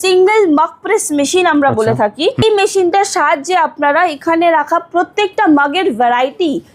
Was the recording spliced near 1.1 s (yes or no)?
no